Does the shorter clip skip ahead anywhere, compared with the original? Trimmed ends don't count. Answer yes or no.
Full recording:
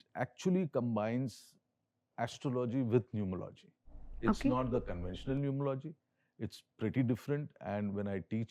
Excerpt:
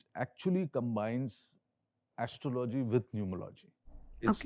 no